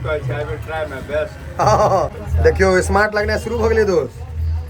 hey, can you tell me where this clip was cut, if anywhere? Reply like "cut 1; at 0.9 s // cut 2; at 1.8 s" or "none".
cut 1; at 2.2 s